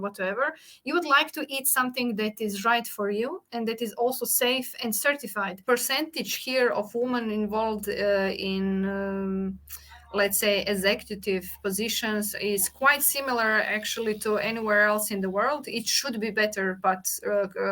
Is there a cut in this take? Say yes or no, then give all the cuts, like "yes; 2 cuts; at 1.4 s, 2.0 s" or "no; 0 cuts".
yes; 1 cut; at 5.6 s